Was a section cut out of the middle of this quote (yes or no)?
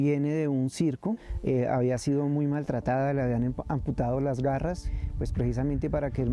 yes